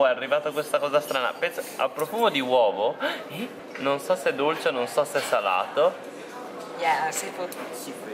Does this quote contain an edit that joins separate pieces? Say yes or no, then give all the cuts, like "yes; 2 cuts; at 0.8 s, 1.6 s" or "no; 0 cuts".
no; 0 cuts